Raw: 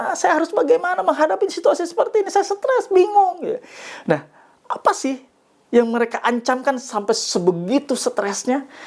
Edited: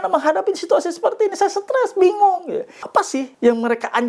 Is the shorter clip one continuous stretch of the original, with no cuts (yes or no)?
no